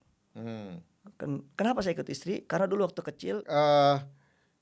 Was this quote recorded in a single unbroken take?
no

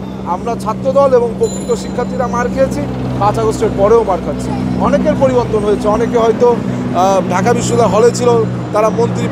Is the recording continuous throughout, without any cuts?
yes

